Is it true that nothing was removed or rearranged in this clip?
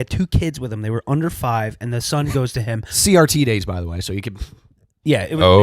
yes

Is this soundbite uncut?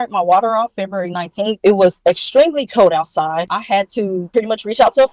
no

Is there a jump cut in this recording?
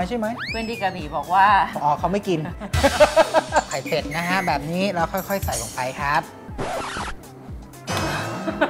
yes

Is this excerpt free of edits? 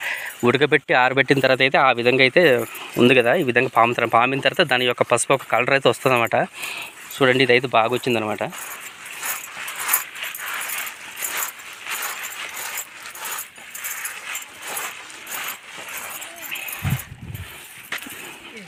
yes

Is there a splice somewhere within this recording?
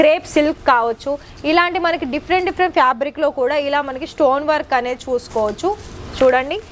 no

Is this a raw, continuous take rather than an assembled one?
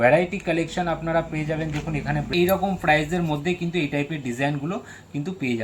no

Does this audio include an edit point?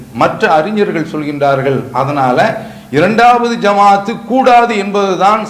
no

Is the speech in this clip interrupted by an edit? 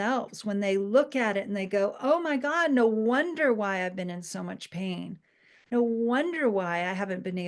no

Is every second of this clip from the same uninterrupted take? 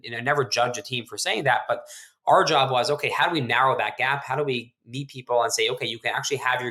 yes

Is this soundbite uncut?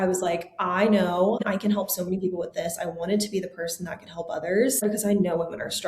no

